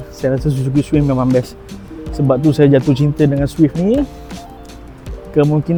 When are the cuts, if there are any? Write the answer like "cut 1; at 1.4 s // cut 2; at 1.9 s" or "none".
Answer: none